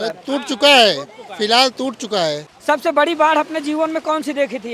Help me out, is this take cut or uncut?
cut